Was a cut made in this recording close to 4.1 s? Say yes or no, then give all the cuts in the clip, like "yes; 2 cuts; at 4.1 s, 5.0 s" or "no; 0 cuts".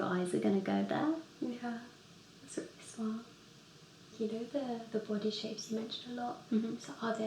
yes; 1 cut; at 4.1 s